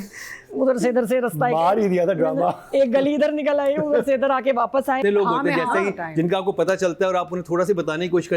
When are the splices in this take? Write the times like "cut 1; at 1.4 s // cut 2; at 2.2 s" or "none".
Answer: cut 1; at 5.0 s

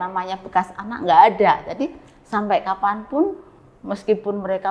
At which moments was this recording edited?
none

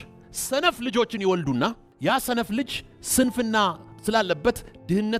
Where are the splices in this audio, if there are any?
cut 1; at 1.9 s // cut 2; at 3.9 s

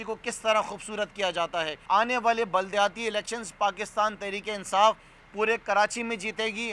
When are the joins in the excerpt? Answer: cut 1; at 1.7 s

